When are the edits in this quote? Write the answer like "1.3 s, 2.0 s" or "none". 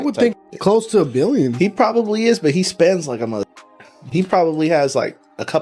none